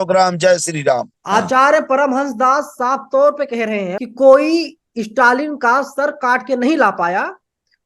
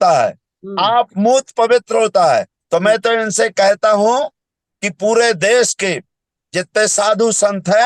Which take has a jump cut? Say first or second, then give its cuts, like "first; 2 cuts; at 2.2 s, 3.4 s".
first; 2 cuts; at 1.1 s, 4.0 s